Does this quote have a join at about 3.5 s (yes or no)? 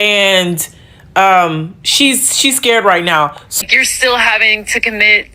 yes